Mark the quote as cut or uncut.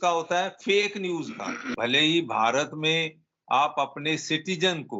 cut